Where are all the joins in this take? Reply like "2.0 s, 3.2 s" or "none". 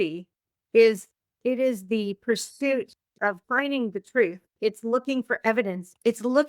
3.4 s